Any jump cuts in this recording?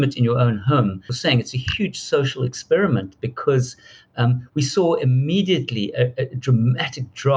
yes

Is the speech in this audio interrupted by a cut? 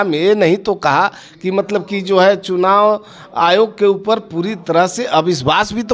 no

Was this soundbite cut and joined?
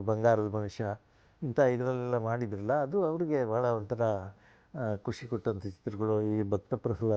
no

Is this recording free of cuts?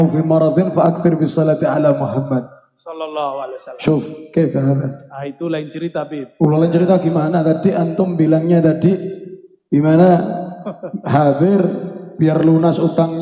yes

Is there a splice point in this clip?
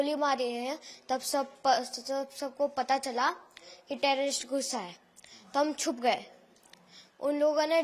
no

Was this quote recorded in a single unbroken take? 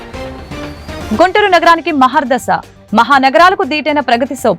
no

